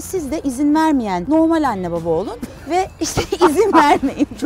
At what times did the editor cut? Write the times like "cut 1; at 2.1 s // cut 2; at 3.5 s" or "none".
cut 1; at 1.2 s